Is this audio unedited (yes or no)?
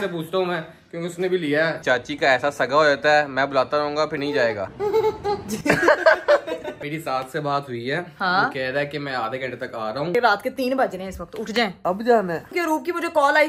no